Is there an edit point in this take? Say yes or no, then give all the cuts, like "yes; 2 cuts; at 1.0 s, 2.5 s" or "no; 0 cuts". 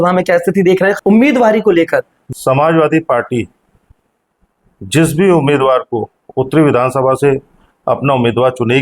yes; 2 cuts; at 1.0 s, 2.2 s